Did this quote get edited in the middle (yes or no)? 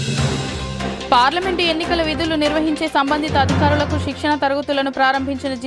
yes